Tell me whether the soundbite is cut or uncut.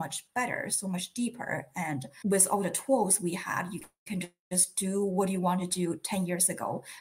cut